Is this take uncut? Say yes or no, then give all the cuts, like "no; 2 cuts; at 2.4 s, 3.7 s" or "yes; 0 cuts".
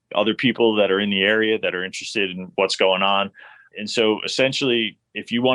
no; 2 cuts; at 2.4 s, 3.6 s